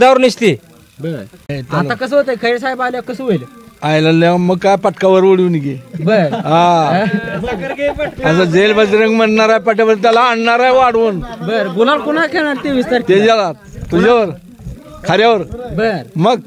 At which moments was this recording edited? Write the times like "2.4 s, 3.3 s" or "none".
1.5 s